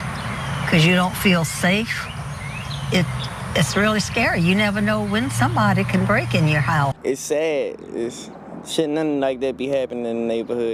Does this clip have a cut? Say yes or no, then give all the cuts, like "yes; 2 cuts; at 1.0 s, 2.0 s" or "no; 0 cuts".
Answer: yes; 1 cut; at 7.0 s